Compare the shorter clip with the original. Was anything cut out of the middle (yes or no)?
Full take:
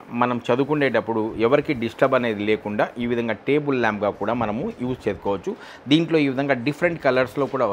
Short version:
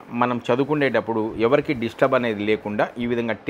no